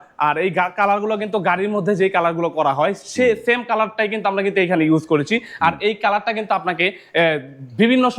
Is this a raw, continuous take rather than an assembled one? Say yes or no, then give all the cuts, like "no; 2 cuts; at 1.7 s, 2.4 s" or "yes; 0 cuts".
yes; 0 cuts